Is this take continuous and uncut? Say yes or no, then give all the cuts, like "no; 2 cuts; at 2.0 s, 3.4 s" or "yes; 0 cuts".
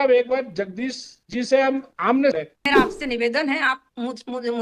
no; 1 cut; at 2.4 s